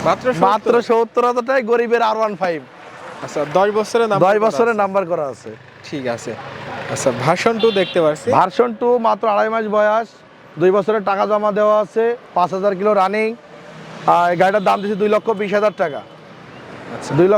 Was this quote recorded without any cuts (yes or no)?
yes